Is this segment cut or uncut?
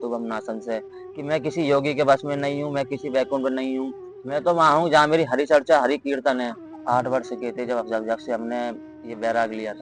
cut